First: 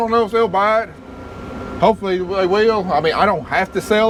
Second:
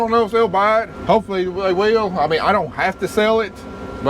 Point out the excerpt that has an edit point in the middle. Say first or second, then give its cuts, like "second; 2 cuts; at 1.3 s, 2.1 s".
second; 1 cut; at 0.9 s